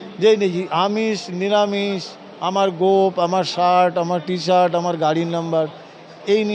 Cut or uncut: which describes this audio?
uncut